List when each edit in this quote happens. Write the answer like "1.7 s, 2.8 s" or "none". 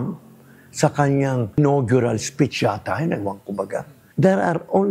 1.6 s, 4.0 s